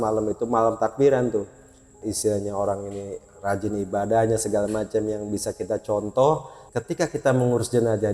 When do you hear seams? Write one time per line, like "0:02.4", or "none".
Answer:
0:02.0
0:06.7